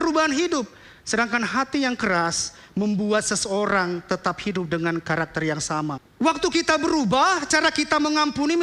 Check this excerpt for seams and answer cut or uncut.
cut